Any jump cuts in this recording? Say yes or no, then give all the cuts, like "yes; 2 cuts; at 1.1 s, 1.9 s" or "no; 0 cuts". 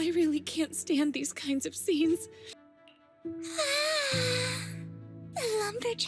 yes; 1 cut; at 2.4 s